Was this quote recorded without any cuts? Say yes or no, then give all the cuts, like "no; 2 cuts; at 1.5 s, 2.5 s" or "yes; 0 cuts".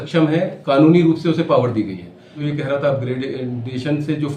no; 1 cut; at 2.4 s